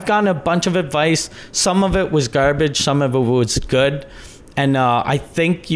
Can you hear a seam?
no; 0 cuts

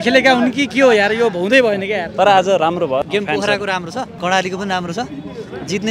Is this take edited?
yes; 2 cuts; at 3.1 s, 4.1 s

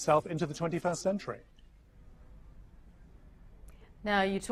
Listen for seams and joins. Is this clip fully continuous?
yes; 0 cuts

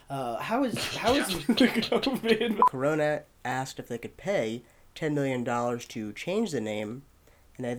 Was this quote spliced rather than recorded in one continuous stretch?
yes; 1 cut; at 2.7 s

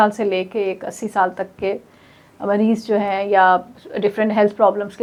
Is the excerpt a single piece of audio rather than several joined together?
yes; 0 cuts

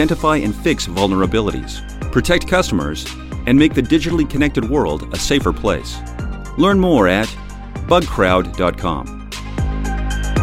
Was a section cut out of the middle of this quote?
yes; 1 cut; at 9.3 s

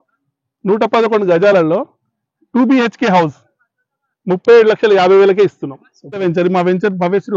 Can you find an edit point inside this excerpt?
yes; 1 cut; at 6.2 s

